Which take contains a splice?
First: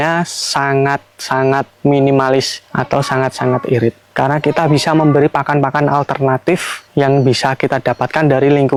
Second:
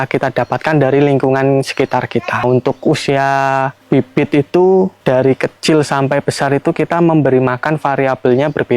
second; 1 cut; at 2.4 s

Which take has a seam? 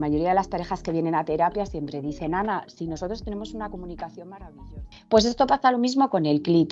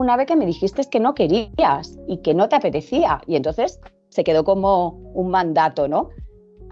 first; 1 cut; at 4.9 s

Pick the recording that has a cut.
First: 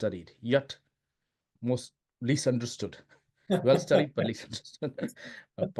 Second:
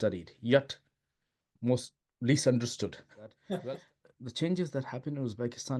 second; 1 cut; at 3.8 s

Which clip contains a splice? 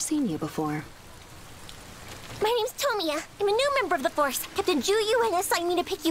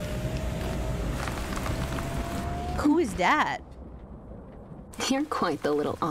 first; 1 cut; at 4.0 s

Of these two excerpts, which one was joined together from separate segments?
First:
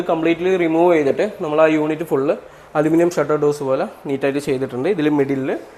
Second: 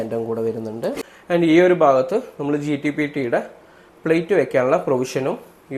second; 1 cut; at 1.1 s

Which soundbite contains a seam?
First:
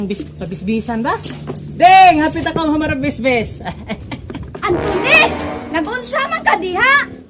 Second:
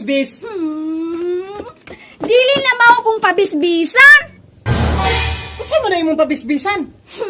first; 1 cut; at 4.5 s

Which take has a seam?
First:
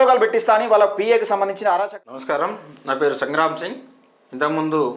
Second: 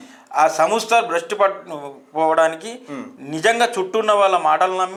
first; 1 cut; at 1.7 s

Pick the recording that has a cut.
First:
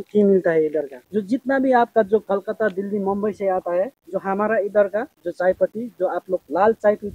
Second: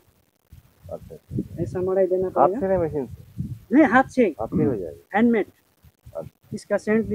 first; 3 cuts; at 1.0 s, 4.0 s, 5.2 s

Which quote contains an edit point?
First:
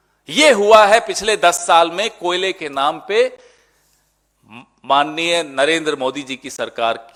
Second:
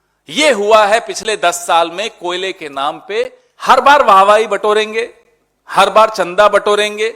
second; 1 cut; at 3.5 s

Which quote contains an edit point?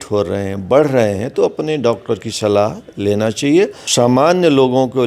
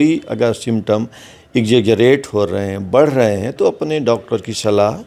first; 1 cut; at 3.8 s

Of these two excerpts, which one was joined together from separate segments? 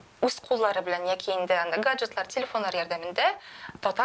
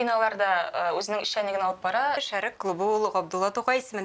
second; 1 cut; at 2.3 s

